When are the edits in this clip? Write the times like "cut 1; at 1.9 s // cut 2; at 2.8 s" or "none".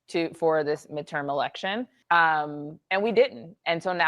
cut 1; at 1.9 s